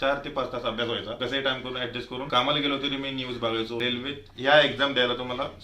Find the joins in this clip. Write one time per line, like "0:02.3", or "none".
0:01.2
0:02.3
0:03.8